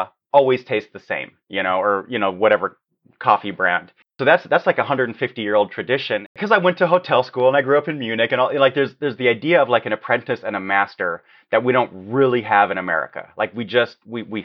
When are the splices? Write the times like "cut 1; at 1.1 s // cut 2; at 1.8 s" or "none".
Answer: cut 1; at 6.4 s